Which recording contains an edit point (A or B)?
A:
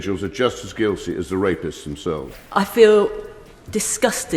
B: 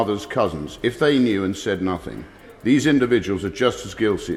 A